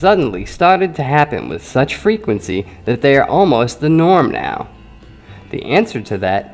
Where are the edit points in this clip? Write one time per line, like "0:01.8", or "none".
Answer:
0:02.2